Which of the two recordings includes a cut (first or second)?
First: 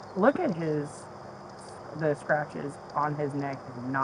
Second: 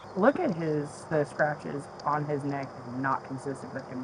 second